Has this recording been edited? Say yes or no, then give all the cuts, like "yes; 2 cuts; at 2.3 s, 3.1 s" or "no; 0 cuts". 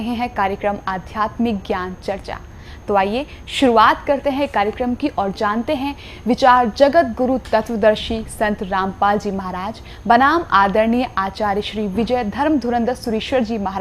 no; 0 cuts